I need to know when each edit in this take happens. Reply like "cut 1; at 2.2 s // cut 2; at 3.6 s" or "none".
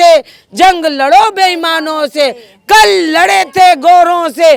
none